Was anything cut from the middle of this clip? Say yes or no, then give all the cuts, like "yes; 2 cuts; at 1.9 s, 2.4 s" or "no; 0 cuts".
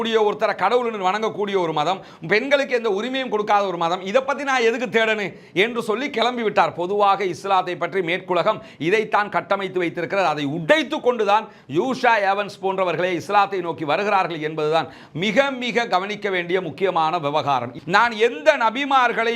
yes; 1 cut; at 17.8 s